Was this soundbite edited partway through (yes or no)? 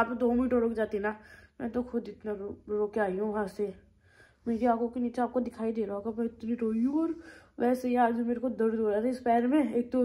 no